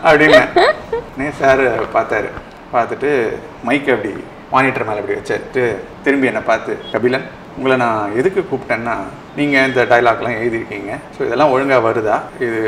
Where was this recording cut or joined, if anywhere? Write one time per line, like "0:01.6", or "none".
none